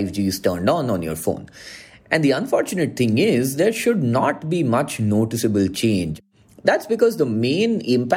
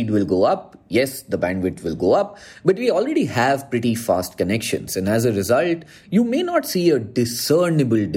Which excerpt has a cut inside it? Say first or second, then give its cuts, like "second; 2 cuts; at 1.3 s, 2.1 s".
first; 1 cut; at 6.1 s